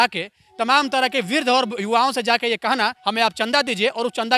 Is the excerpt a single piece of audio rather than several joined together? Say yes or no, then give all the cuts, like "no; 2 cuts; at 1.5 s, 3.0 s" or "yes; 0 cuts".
no; 1 cut; at 3.0 s